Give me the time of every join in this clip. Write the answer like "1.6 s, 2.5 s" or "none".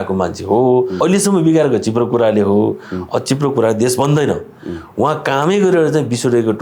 1.0 s